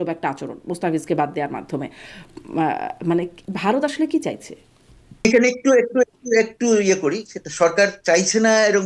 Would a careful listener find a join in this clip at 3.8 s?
no; 1 cut; at 5.2 s

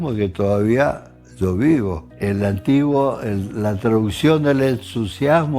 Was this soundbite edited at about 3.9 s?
no; 1 cut; at 2.1 s

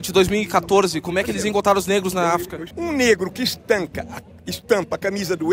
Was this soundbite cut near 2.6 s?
yes; 1 cut; at 2.6 s

